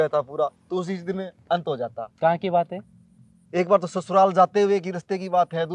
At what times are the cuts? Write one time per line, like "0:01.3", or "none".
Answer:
none